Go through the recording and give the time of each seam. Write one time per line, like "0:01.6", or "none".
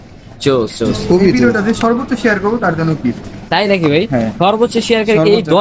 0:01.4

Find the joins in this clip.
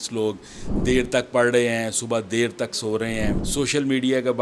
0:03.4

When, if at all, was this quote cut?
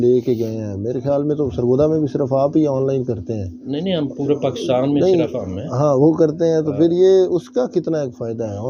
none

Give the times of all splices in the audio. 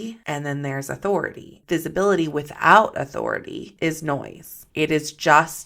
0:01.5

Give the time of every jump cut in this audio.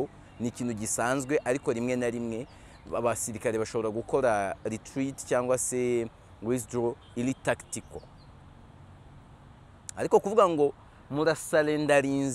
none

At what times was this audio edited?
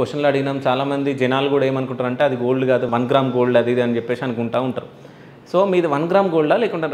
0:02.9

